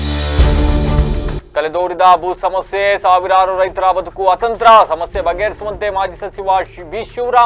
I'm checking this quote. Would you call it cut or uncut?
uncut